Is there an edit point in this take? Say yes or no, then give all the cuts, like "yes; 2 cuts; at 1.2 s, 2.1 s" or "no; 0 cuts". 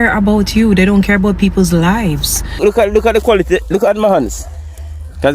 yes; 1 cut; at 2.6 s